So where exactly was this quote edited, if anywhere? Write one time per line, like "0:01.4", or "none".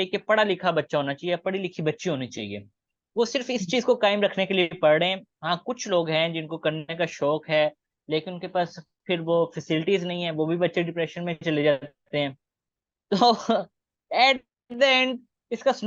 none